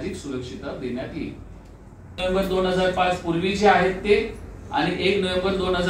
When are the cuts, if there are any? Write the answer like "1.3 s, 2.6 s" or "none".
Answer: 2.2 s